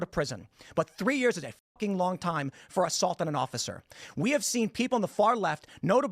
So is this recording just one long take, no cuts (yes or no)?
no